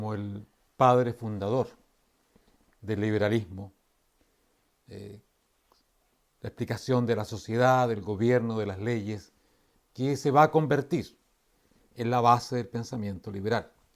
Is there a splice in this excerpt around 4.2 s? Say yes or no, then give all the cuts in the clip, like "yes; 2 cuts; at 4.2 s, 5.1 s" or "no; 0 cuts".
yes; 1 cut; at 4.2 s